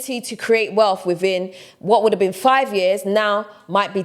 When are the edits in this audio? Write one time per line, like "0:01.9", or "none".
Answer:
none